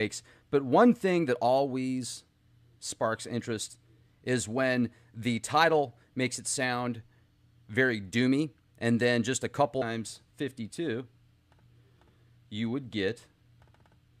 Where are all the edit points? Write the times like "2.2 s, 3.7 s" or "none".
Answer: none